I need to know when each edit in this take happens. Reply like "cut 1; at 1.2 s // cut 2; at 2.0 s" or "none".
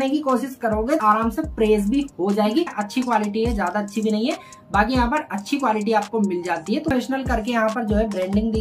cut 1; at 1.0 s // cut 2; at 2.8 s // cut 3; at 6.9 s

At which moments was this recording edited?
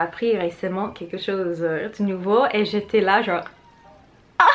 none

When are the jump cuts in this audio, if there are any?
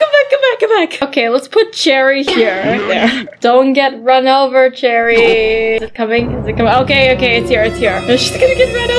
cut 1; at 3.4 s // cut 2; at 5.9 s

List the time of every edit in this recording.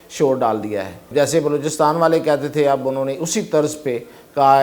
cut 1; at 1.0 s

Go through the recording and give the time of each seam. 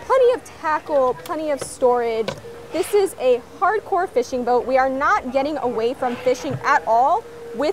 none

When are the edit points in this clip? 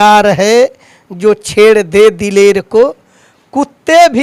none

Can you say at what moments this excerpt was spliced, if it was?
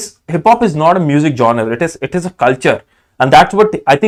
none

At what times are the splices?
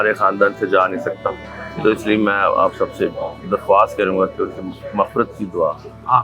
none

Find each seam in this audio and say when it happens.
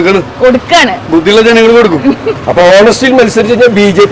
cut 1; at 2.3 s

